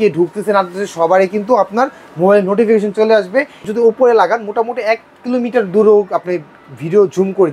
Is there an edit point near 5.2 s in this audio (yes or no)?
no